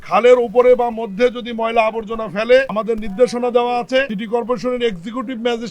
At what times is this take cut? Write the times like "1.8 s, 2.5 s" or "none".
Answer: 2.7 s, 4.1 s